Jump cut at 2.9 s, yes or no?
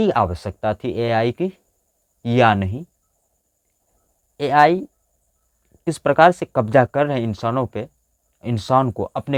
no